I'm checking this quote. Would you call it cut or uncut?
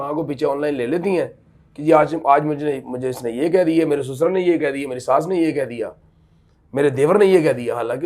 uncut